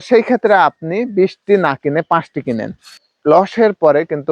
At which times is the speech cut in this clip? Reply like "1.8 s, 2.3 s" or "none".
3.0 s